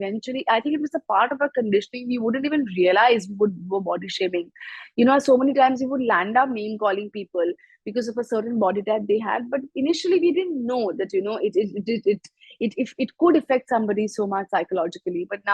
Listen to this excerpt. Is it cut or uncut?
uncut